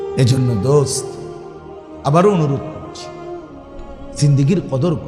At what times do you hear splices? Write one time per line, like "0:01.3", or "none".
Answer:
0:02.6
0:04.2